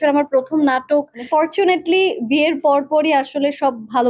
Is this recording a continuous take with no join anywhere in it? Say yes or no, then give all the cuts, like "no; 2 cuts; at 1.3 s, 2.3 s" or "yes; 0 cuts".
no; 1 cut; at 1.2 s